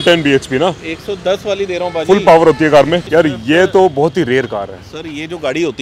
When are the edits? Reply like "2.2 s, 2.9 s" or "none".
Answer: 3.0 s